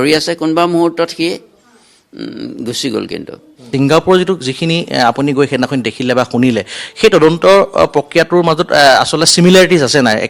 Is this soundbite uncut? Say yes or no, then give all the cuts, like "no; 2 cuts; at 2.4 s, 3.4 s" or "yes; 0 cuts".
no; 1 cut; at 3.6 s